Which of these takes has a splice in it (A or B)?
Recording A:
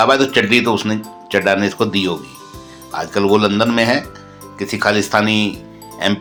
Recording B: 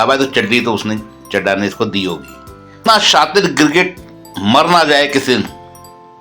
B